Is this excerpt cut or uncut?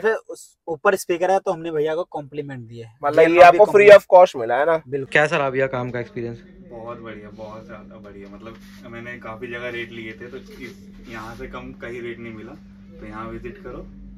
cut